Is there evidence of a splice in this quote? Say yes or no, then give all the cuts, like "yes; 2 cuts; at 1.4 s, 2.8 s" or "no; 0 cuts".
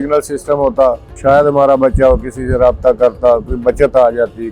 yes; 1 cut; at 1.1 s